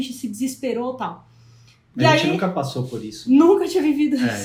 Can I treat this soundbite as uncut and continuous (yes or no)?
yes